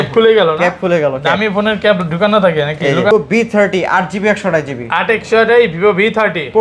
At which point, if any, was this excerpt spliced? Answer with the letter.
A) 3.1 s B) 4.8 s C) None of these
A